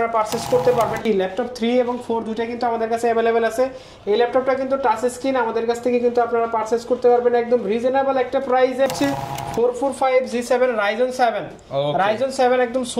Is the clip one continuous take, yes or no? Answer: no